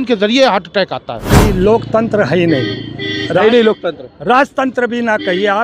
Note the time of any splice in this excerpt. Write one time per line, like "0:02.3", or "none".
0:01.3